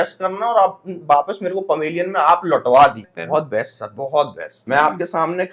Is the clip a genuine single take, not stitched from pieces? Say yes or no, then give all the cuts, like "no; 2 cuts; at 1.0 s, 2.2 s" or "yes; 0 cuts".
no; 2 cuts; at 3.1 s, 4.5 s